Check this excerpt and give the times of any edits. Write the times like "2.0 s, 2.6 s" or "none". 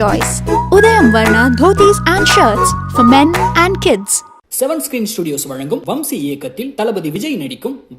none